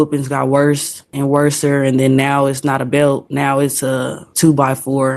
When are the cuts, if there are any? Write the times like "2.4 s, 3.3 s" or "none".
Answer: none

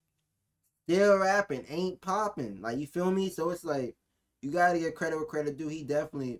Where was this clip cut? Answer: none

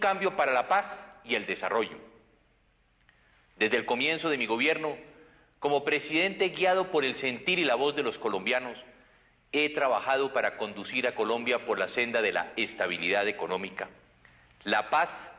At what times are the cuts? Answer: 13.7 s

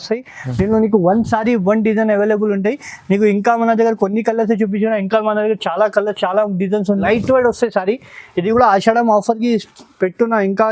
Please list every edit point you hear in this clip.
7.0 s

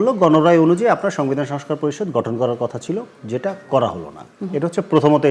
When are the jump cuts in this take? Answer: none

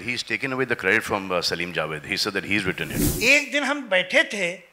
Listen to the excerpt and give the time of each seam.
3.0 s

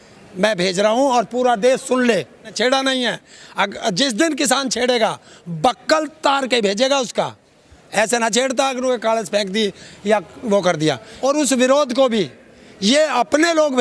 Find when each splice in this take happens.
2.5 s, 11.1 s

